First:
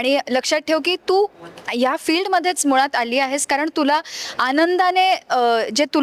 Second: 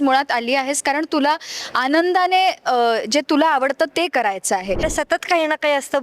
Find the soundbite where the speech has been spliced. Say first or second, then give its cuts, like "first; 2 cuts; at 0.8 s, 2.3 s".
second; 1 cut; at 4.8 s